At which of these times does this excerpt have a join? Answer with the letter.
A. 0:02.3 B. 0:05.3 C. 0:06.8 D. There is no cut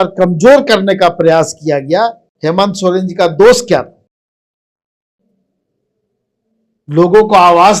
A